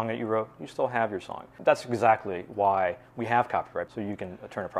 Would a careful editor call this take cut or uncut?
cut